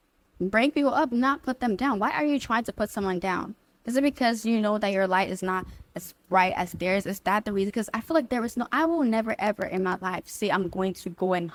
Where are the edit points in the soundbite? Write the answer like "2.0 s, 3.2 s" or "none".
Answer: none